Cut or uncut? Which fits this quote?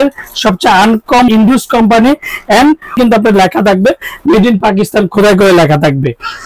cut